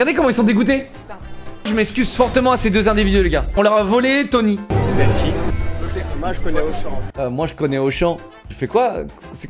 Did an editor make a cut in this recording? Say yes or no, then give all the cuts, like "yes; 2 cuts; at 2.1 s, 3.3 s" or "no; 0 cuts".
no; 0 cuts